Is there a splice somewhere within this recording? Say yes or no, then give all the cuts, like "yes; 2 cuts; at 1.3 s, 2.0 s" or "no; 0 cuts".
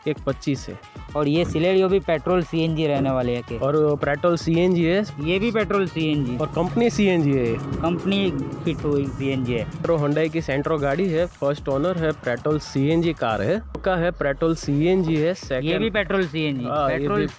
yes; 4 cuts; at 1.0 s, 3.5 s, 9.8 s, 13.8 s